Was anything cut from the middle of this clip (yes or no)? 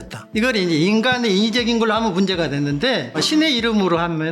yes